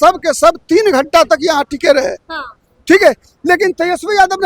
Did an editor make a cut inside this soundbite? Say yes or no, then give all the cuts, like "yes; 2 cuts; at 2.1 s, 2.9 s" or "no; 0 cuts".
no; 0 cuts